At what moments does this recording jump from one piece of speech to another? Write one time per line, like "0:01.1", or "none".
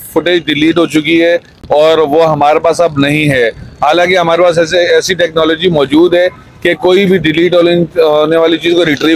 none